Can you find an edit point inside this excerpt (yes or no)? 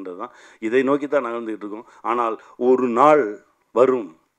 no